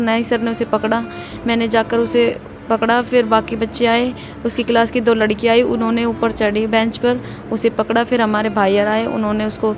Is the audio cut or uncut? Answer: uncut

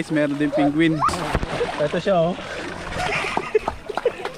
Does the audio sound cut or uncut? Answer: cut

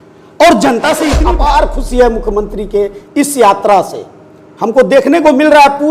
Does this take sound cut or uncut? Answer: cut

